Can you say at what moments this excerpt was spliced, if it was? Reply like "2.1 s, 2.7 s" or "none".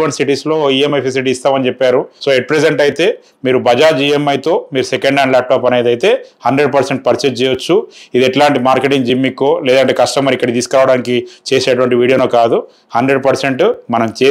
2.1 s